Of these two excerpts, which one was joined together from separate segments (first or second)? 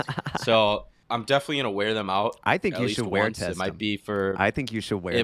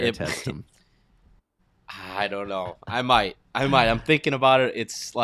first